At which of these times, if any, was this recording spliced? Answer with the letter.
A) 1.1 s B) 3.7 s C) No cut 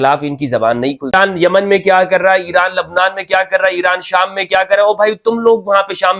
A